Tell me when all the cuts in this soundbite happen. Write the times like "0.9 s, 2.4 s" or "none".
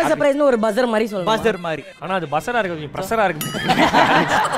1.6 s